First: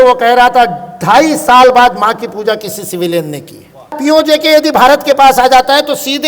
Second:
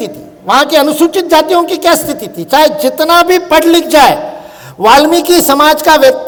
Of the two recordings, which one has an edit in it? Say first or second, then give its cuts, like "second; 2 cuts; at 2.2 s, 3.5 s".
first; 1 cut; at 3.9 s